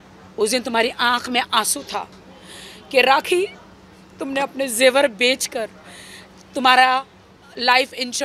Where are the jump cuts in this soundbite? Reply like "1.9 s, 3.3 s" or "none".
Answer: none